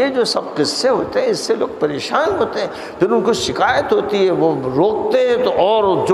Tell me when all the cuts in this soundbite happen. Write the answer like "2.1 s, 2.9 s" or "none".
none

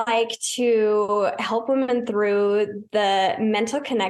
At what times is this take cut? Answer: none

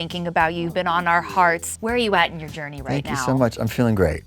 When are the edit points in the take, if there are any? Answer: 1.7 s

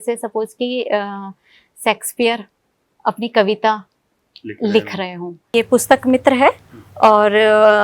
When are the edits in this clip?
5.5 s

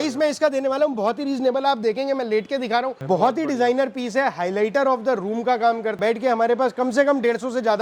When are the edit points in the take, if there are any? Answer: 3.0 s, 6.0 s

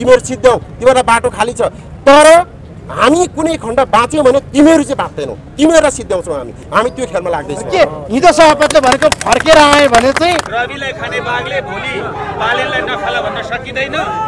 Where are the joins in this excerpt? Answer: 10.5 s

